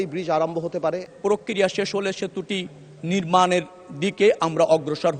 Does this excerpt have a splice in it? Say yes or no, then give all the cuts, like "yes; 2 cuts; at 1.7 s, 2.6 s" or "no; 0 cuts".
yes; 1 cut; at 1.1 s